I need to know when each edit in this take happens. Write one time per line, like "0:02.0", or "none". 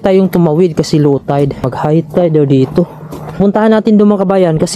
0:01.7
0:03.4